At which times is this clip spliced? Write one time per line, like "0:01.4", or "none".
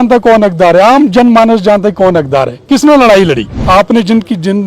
0:03.5